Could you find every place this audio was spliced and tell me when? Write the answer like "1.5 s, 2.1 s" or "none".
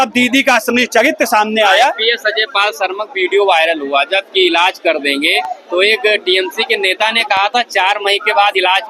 none